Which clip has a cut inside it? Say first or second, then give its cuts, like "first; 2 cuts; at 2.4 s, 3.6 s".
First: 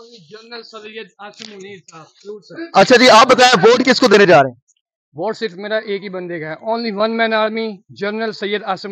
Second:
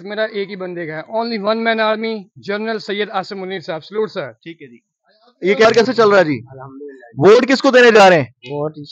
second; 1 cut; at 5.6 s